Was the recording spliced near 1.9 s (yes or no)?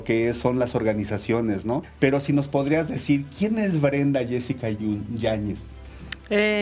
yes